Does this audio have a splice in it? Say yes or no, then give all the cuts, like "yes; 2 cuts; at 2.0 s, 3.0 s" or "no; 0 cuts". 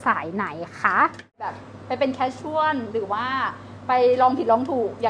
yes; 1 cut; at 1.5 s